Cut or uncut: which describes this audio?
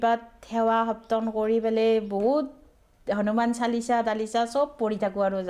uncut